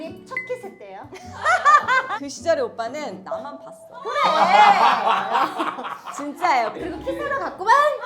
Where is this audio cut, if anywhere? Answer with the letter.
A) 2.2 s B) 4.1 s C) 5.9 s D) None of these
A